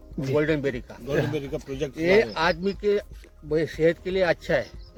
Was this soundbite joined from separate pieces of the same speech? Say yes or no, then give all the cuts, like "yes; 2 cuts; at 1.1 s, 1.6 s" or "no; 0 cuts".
no; 0 cuts